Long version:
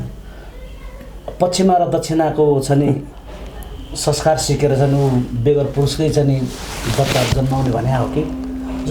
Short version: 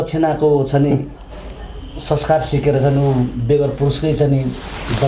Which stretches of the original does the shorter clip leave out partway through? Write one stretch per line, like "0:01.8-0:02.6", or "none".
none